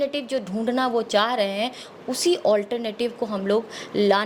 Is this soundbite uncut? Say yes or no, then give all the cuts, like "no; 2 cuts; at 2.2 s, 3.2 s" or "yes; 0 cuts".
yes; 0 cuts